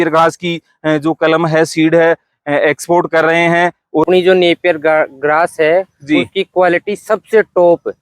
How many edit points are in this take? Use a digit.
1